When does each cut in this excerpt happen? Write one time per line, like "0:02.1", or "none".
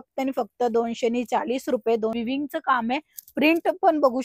0:02.1